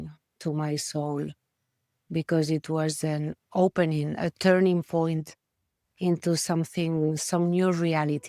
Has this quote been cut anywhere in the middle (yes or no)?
no